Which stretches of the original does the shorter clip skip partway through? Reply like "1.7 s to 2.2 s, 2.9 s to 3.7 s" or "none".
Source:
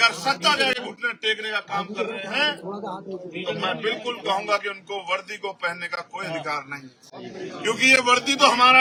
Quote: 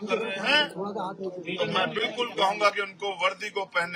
none